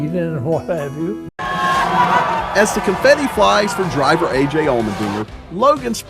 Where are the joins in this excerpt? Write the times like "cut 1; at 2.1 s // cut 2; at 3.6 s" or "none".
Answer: cut 1; at 1.4 s